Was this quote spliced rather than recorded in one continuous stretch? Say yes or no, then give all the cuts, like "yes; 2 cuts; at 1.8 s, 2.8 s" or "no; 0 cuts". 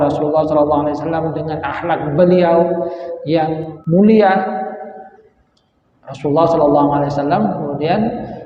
yes; 1 cut; at 3.7 s